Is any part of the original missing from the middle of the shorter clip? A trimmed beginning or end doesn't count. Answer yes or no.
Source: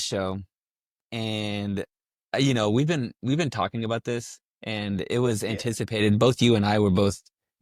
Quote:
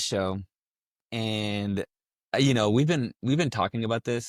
no